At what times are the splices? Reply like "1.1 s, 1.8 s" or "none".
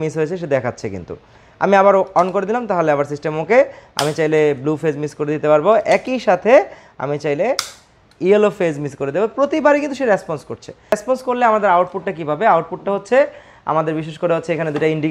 none